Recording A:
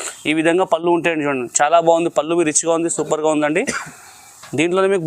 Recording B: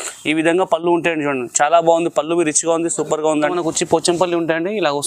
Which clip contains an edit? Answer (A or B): B